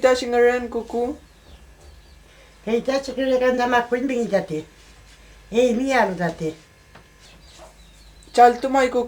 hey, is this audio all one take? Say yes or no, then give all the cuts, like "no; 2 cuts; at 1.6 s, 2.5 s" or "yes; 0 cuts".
no; 2 cuts; at 2.2 s, 7.2 s